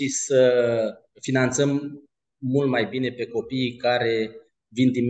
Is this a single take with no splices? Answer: no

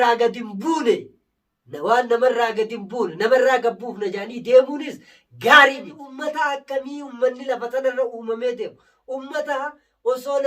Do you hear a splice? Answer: yes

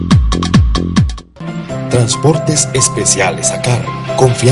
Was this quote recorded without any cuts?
no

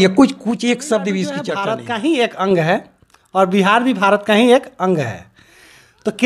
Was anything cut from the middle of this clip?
yes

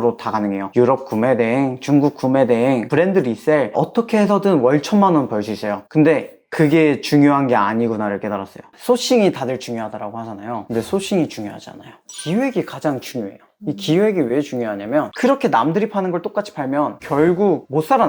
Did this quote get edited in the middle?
yes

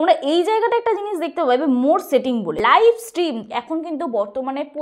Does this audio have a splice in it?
yes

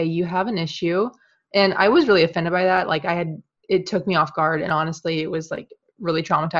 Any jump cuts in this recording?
no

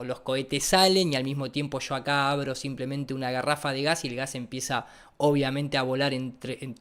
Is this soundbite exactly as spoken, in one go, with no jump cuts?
yes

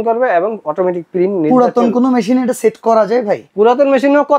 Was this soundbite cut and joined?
no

